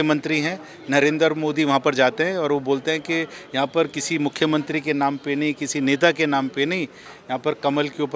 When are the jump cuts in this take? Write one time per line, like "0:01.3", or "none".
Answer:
none